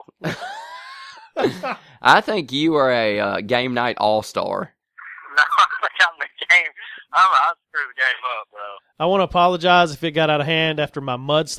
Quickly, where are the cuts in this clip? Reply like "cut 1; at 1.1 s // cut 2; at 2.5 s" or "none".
none